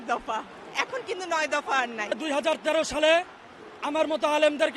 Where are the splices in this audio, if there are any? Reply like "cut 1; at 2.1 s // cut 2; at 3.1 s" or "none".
cut 1; at 2.2 s